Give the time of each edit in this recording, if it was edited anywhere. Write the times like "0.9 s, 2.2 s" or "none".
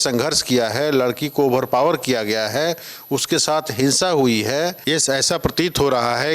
4.8 s